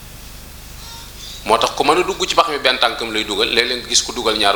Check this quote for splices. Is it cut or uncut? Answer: uncut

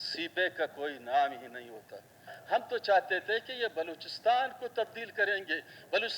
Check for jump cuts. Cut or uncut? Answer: cut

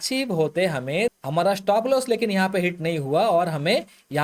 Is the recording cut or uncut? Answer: cut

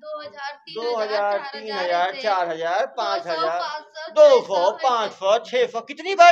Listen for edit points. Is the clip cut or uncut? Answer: uncut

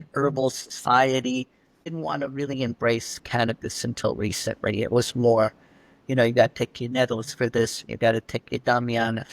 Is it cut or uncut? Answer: cut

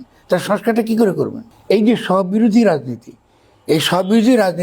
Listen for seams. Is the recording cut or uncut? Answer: uncut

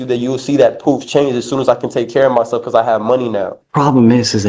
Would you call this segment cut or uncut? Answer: cut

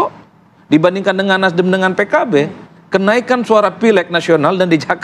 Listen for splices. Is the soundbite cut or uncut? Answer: uncut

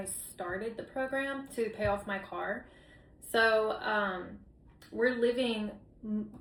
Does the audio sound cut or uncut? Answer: uncut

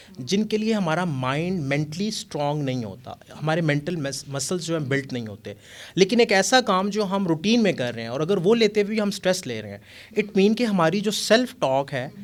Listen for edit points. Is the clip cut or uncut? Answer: uncut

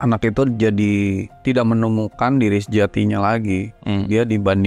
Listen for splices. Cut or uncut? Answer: cut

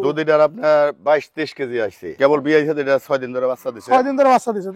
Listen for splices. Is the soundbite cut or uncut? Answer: cut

